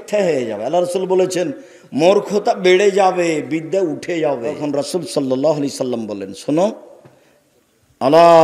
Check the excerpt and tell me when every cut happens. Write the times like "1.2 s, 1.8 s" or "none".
4.6 s